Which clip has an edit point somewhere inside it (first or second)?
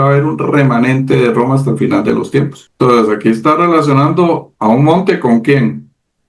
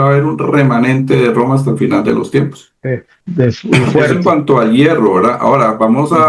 first